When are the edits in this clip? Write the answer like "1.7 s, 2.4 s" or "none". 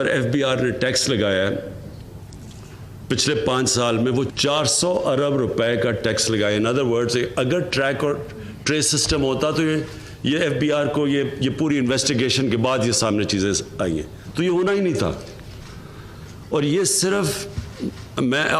5.4 s